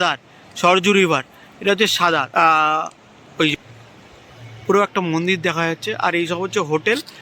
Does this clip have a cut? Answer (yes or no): yes